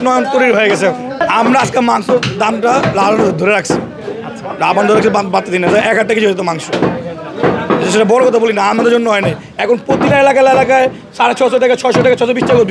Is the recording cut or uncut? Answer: cut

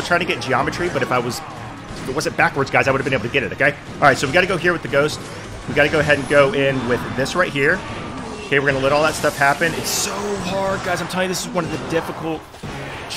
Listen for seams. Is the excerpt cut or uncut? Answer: uncut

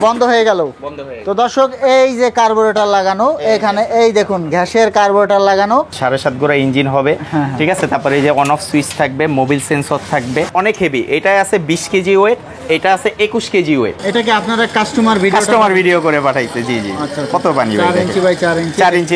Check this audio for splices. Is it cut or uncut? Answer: cut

